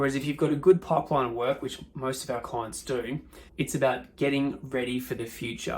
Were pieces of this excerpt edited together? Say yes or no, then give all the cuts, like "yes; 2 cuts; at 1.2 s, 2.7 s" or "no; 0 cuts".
yes; 1 cut; at 3.4 s